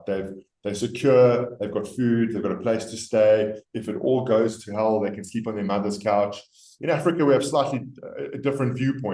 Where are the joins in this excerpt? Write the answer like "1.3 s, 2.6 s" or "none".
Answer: none

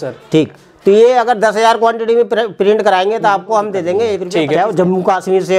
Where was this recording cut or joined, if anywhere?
4.2 s

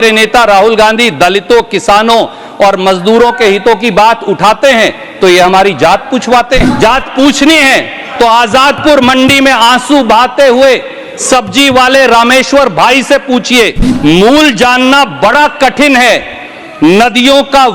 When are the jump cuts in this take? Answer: 6.7 s, 13.8 s

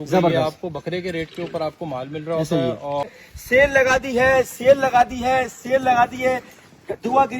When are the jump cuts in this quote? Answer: 3.1 s

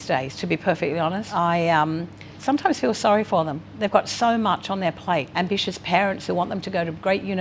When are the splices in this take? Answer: 1.3 s, 5.3 s

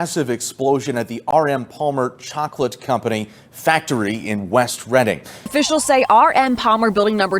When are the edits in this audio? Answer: 5.5 s

